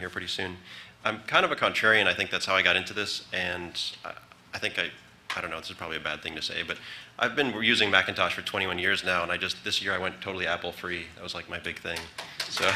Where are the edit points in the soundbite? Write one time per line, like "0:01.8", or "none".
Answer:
0:02.6